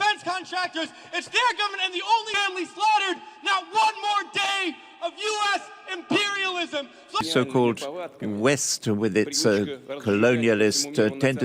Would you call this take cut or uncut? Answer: cut